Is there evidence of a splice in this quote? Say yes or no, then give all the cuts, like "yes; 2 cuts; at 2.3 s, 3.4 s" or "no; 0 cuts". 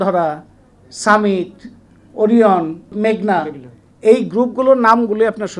yes; 1 cut; at 2.8 s